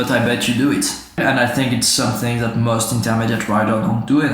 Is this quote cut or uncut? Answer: cut